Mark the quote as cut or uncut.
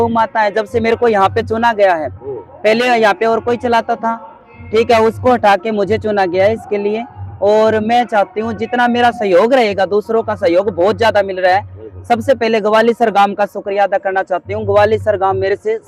uncut